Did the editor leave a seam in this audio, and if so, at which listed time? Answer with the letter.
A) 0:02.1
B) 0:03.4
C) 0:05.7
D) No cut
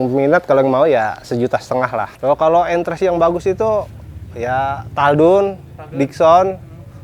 A